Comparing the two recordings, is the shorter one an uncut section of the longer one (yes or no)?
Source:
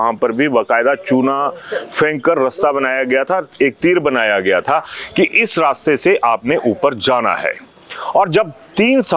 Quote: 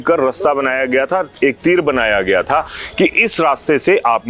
yes